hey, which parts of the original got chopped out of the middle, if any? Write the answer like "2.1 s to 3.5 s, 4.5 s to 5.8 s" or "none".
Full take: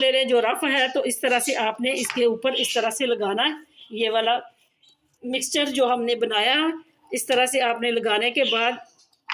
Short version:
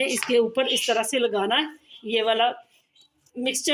none